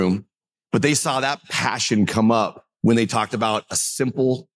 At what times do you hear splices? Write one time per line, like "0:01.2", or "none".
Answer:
none